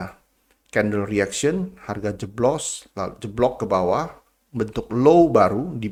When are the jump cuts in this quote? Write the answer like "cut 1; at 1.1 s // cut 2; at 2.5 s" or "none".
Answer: none